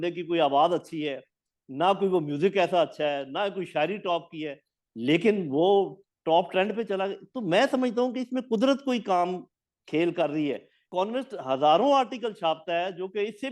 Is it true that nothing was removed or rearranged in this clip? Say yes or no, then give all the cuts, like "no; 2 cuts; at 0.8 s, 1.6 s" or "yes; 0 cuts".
no; 1 cut; at 10.7 s